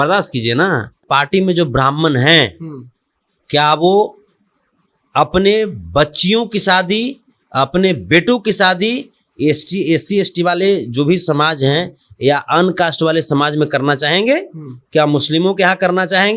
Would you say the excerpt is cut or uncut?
cut